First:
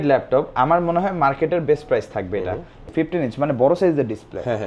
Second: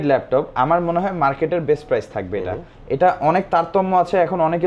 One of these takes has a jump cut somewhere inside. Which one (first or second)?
first